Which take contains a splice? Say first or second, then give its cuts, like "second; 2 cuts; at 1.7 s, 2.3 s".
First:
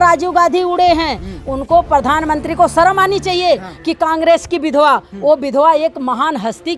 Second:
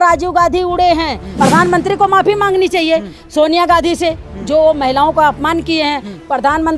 second; 1 cut; at 1.3 s